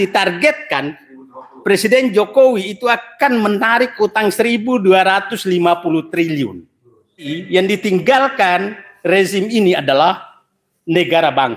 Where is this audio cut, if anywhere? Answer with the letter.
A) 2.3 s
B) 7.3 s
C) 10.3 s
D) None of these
B